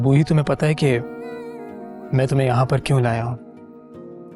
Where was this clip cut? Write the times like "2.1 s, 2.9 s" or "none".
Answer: none